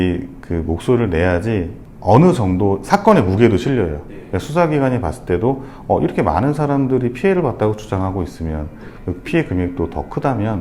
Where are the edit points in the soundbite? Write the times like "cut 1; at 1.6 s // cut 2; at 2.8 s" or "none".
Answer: none